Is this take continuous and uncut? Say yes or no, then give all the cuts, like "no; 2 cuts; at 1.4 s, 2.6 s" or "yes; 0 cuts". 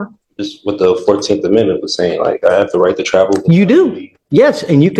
yes; 0 cuts